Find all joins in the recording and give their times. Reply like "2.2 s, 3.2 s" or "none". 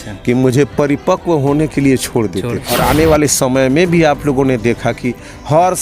2.7 s